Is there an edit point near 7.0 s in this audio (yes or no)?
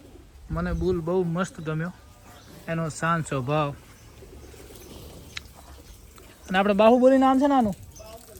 no